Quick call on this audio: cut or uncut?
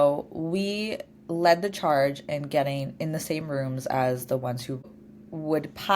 cut